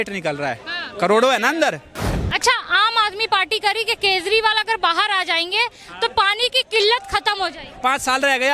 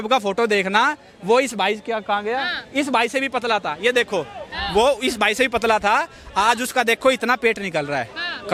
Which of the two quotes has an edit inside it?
first; 2 cuts; at 2.2 s, 7.7 s

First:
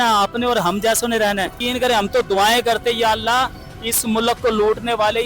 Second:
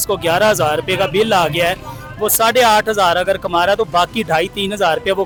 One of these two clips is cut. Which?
first; 1 cut; at 1.6 s

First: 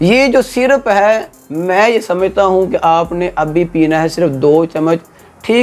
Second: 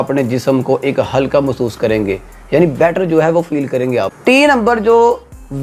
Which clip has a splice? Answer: second; 1 cut; at 4.1 s

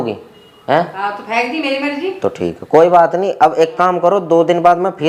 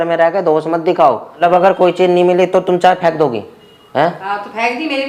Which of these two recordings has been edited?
second; 1 cut; at 1.4 s

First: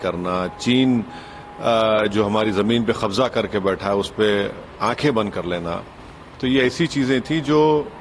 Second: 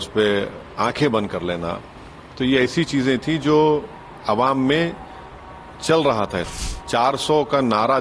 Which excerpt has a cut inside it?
second; 1 cut; at 6.5 s

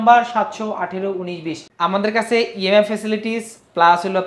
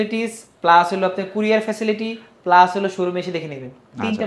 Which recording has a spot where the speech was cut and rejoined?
first; 1 cut; at 1.6 s

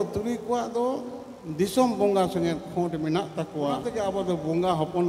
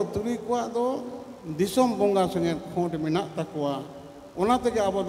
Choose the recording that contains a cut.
first; 1 cut; at 3.9 s

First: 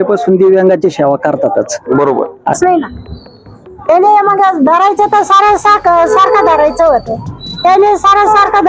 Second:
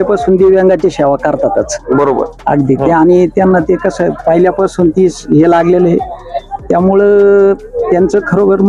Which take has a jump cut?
first; 1 cut; at 2.5 s

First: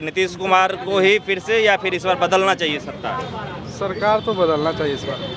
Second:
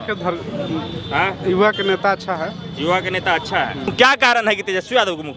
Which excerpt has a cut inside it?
second; 1 cut; at 3.9 s

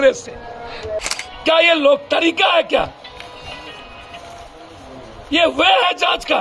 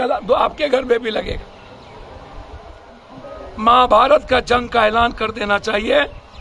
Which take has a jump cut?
first; 1 cut; at 1.1 s

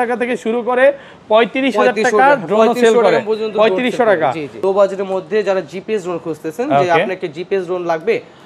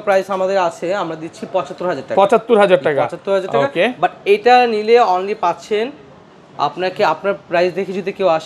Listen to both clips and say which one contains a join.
first; 1 cut; at 4.6 s

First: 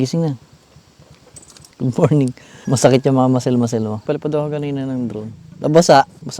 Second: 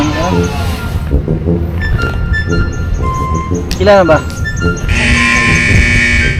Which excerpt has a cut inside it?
first; 3 cuts; at 1.6 s, 2.6 s, 4.0 s

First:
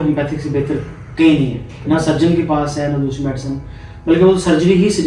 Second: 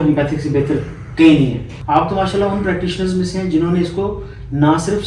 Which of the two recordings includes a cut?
second; 1 cut; at 1.7 s

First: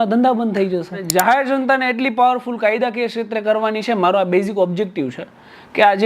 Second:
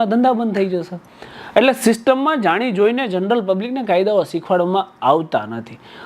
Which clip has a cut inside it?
first; 1 cut; at 1.0 s

